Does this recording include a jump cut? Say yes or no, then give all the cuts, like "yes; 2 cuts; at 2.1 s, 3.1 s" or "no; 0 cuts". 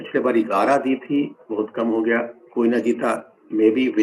no; 0 cuts